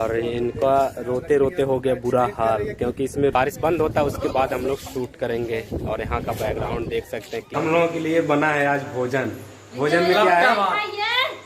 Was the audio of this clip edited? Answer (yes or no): yes